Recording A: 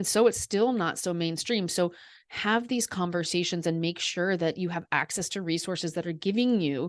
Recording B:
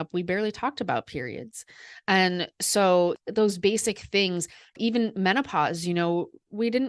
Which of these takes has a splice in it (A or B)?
B